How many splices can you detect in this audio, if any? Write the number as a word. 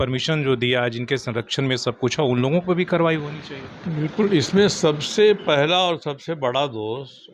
zero